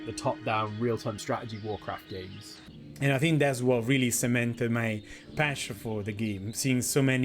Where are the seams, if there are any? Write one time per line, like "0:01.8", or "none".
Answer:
0:02.6